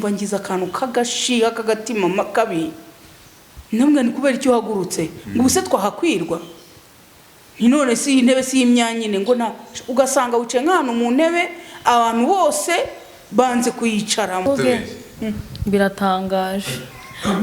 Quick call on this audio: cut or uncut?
cut